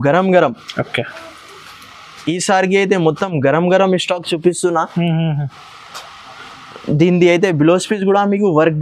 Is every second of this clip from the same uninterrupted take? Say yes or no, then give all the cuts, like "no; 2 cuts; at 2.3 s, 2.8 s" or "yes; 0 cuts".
yes; 0 cuts